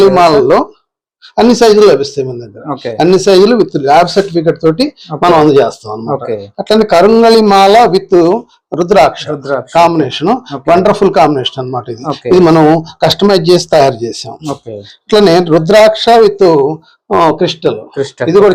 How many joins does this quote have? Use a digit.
0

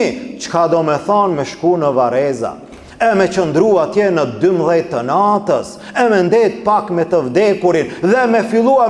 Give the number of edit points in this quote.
0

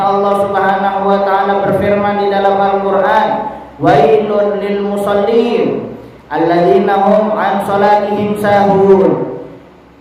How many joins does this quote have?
0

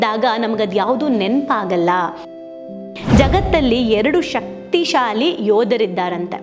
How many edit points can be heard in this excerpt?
1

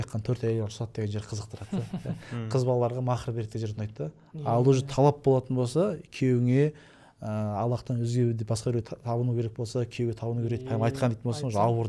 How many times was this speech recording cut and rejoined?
0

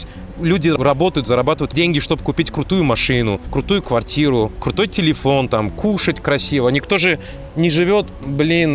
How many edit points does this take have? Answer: 4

